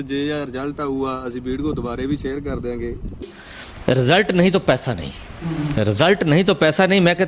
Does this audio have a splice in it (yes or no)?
yes